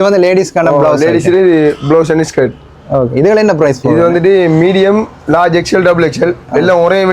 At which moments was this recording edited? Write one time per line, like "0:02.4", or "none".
none